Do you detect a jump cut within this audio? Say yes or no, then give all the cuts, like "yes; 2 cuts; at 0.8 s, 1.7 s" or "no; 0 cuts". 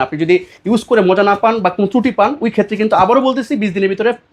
no; 0 cuts